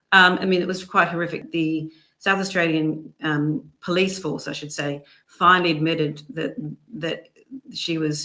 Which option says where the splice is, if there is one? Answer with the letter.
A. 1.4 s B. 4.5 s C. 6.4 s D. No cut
A